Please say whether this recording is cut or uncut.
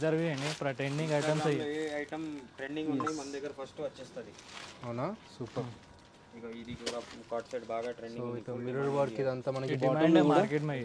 uncut